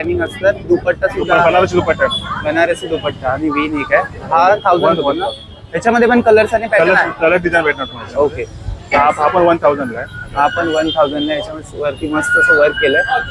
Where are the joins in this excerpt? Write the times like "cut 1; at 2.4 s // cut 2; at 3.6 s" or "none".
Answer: none